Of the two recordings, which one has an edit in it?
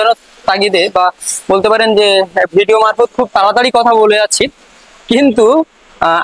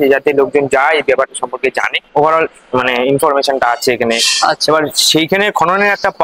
second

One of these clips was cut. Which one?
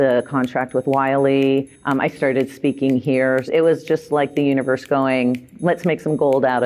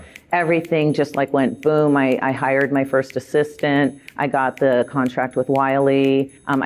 first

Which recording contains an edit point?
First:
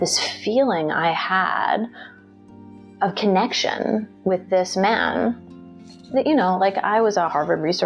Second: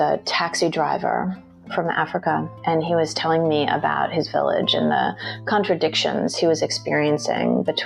second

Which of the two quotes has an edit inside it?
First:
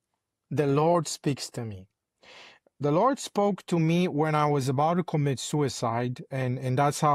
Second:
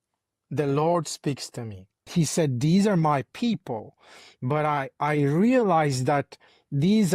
second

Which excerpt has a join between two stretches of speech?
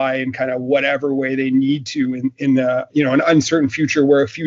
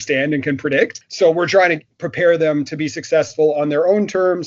second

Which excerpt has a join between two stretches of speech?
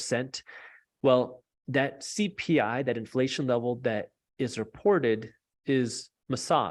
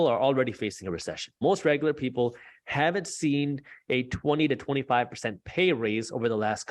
second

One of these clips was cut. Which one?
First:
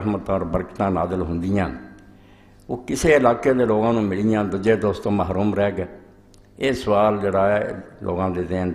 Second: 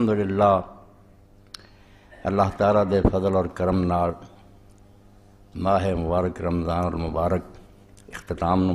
first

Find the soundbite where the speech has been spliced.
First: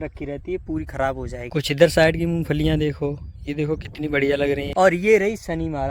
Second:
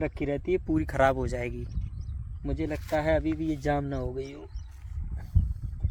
first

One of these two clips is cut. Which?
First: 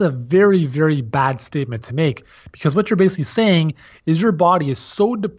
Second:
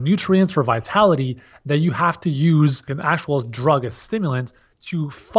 second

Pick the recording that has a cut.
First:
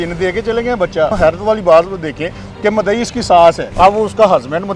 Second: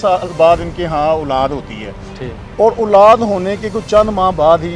first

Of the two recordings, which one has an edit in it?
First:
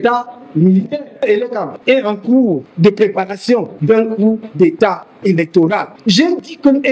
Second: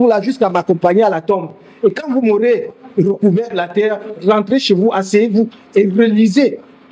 first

